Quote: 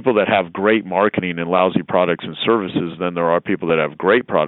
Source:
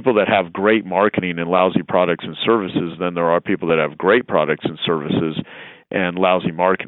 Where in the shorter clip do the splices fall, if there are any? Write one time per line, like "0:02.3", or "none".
none